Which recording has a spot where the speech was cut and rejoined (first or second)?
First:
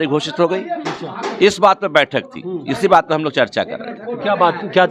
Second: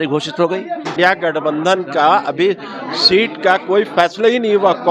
second